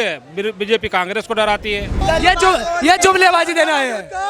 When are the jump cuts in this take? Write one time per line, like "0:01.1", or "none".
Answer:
0:01.9